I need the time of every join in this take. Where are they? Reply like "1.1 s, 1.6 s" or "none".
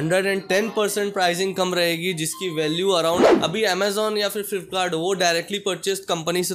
3.3 s